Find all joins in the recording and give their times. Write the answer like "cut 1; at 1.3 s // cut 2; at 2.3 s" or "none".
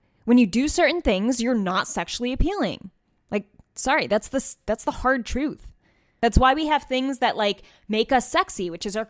cut 1; at 6.1 s